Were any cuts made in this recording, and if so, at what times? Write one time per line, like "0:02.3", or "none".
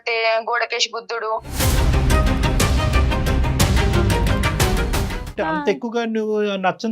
0:05.3